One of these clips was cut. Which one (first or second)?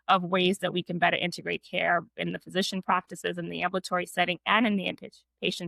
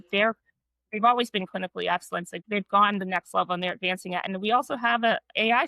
second